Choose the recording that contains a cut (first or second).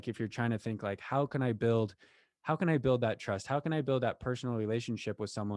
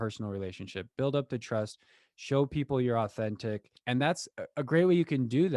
second